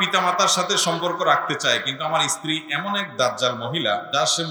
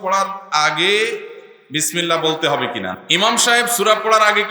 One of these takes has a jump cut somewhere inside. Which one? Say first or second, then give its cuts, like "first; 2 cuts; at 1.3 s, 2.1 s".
second; 1 cut; at 2.9 s